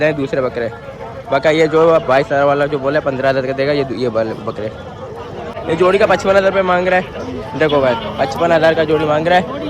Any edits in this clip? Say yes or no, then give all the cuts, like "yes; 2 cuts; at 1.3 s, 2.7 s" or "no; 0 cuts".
yes; 1 cut; at 5.5 s